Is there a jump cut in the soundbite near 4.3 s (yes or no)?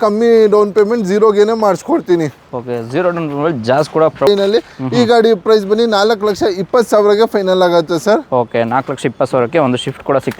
yes